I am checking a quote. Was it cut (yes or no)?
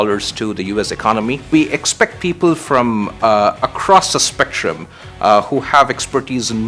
yes